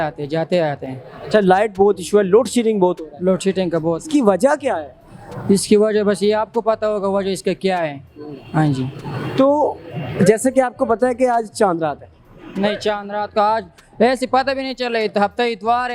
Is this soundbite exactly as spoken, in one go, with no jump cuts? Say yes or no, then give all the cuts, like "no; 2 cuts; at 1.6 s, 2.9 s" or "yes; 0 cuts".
yes; 0 cuts